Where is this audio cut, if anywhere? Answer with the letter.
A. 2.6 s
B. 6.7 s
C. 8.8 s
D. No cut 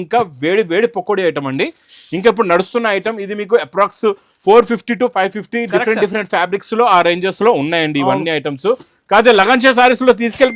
D